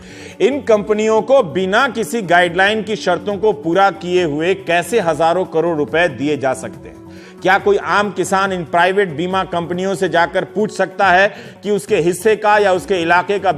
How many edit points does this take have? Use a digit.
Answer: 0